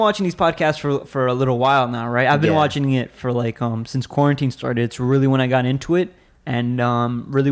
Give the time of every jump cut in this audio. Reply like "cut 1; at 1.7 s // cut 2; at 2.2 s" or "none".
none